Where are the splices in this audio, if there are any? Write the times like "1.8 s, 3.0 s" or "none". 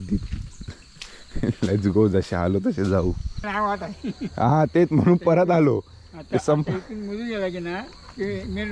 3.5 s